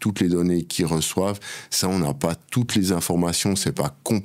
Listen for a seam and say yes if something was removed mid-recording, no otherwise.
no